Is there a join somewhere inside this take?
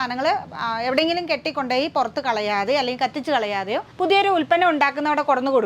yes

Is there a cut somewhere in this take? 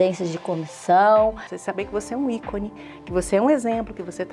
yes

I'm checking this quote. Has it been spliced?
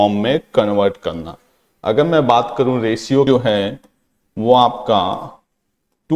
yes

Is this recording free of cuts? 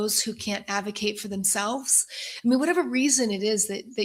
yes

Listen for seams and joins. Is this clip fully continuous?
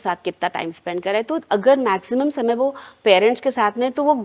yes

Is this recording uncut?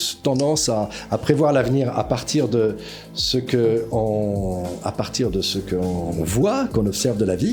yes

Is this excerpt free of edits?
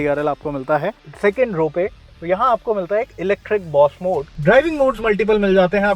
no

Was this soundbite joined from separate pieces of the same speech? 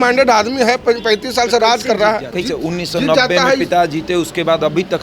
yes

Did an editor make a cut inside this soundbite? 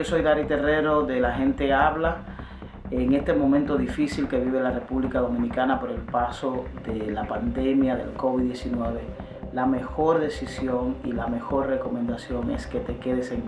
no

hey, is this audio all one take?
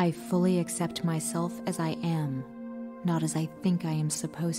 yes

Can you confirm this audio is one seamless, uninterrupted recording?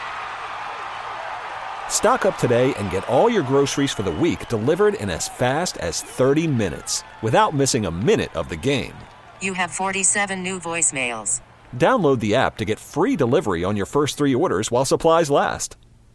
yes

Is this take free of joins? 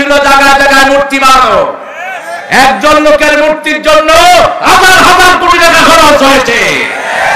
yes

